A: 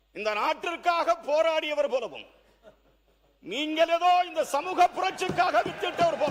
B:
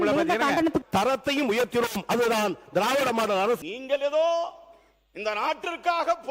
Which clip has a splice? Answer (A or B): B